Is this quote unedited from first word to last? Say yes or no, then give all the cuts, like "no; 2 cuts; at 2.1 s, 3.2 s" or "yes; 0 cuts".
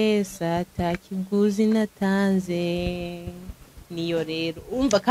yes; 0 cuts